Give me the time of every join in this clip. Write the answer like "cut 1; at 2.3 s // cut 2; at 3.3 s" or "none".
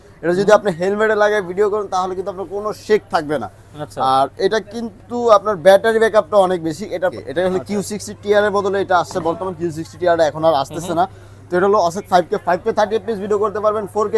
cut 1; at 7.1 s